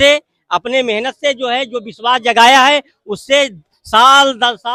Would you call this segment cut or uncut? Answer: uncut